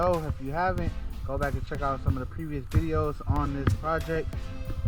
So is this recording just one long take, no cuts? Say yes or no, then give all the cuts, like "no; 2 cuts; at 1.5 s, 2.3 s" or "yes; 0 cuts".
yes; 0 cuts